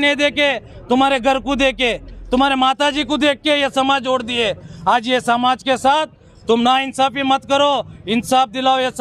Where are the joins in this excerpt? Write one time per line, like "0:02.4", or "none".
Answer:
none